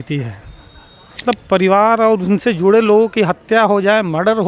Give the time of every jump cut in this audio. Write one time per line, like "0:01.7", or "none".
0:01.2